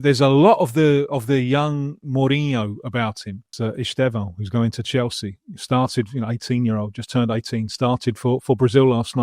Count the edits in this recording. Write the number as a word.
one